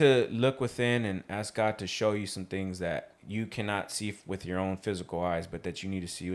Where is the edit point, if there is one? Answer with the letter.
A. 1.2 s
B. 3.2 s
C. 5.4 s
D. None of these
B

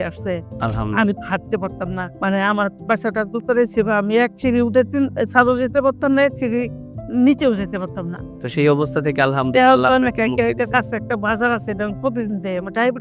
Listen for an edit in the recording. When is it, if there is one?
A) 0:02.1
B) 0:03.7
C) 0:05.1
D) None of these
A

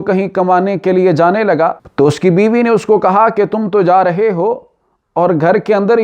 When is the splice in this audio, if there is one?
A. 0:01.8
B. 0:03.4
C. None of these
A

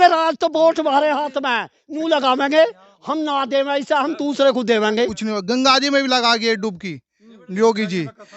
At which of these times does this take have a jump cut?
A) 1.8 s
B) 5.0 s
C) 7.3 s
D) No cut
B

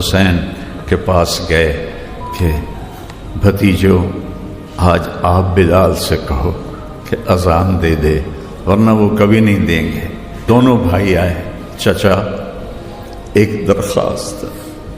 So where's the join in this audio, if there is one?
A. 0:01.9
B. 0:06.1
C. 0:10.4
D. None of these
C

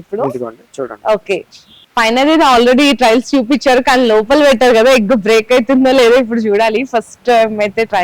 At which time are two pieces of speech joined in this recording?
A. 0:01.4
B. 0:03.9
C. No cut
C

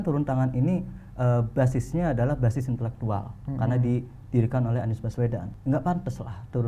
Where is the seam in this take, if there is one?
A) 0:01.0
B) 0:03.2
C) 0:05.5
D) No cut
C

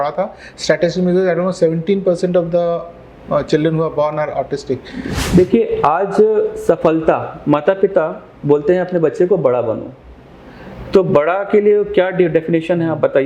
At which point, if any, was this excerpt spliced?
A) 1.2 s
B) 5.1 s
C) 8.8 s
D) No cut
B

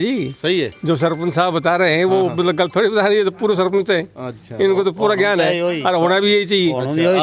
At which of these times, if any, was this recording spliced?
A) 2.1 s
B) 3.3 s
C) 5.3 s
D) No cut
D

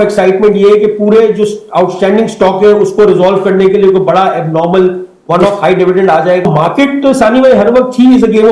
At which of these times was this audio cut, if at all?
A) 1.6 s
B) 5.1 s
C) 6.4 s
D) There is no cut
C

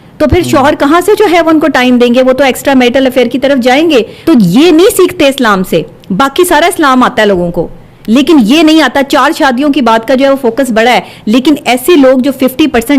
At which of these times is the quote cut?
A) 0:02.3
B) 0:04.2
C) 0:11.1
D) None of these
B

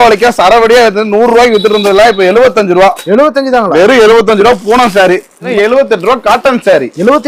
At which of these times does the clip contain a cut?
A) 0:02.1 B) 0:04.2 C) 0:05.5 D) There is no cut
C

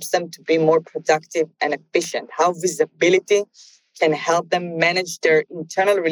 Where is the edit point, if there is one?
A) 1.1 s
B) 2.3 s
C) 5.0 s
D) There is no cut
D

